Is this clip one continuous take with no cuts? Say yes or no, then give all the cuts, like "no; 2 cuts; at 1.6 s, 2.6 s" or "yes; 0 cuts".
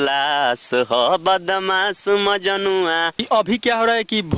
no; 1 cut; at 3.2 s